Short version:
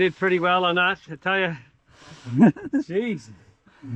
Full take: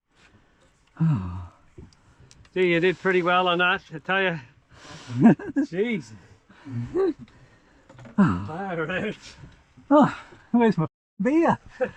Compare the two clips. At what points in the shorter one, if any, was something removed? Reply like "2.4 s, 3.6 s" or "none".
none